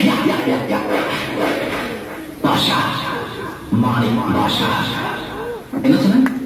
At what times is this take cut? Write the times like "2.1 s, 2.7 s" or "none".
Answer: none